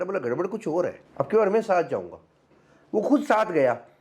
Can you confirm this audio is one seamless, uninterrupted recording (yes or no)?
no